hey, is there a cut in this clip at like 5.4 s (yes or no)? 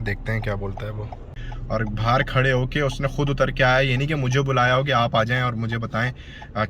no